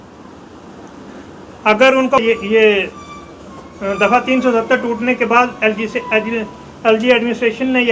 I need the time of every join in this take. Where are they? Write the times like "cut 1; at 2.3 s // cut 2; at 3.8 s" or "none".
cut 1; at 2.2 s

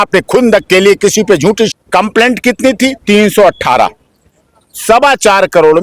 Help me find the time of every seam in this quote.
cut 1; at 1.7 s

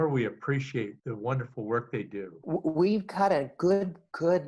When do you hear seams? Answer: cut 1; at 1.0 s // cut 2; at 2.3 s

